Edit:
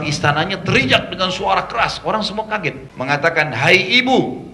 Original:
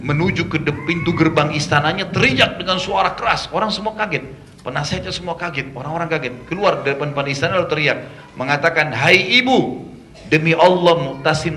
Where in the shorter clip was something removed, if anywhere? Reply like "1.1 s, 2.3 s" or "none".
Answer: 2.9 s